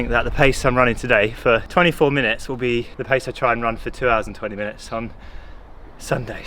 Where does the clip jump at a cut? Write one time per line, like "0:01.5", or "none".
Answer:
0:01.7
0:02.9